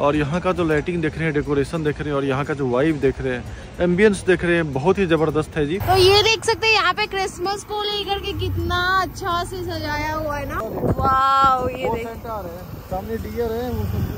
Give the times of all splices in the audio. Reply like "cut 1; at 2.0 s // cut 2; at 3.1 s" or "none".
cut 1; at 5.8 s // cut 2; at 10.5 s